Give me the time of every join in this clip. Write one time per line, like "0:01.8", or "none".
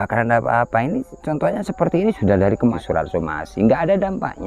0:02.8